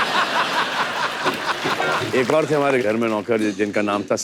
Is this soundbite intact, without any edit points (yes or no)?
no